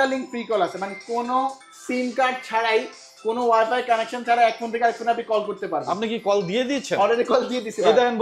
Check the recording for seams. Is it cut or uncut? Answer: uncut